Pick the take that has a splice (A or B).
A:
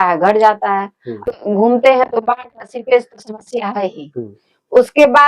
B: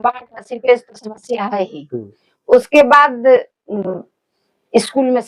A